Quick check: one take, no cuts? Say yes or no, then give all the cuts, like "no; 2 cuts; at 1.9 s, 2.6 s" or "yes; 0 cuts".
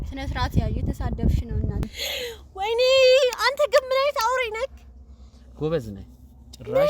no; 1 cut; at 1.9 s